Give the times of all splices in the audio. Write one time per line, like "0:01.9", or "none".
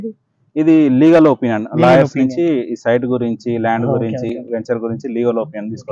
none